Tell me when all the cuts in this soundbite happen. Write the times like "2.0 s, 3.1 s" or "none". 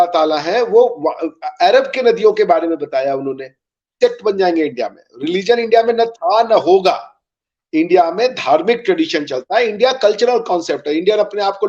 4.0 s